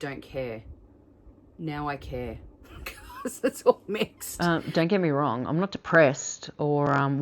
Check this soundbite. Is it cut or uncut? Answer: cut